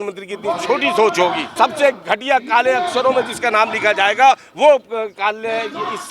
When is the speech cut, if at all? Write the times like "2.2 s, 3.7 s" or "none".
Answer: 1.5 s